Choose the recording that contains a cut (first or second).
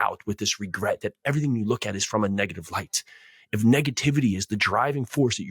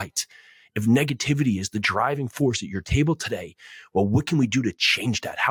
first